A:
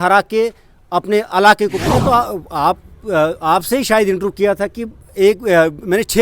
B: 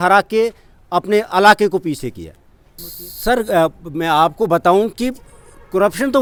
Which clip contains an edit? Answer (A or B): A